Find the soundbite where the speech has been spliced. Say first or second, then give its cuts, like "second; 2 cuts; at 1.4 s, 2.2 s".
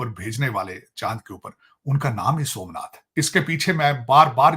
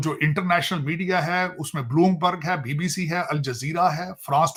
first; 1 cut; at 3.1 s